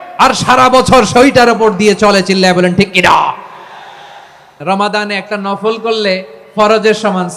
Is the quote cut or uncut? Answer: cut